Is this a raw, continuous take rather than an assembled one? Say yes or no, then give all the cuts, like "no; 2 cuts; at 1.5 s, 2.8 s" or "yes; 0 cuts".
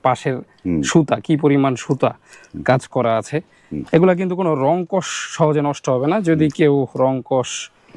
yes; 0 cuts